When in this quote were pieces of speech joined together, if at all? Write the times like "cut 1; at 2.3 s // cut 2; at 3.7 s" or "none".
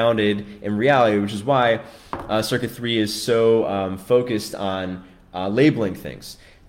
none